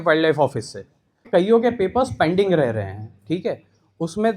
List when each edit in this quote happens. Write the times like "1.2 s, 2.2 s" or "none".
1.2 s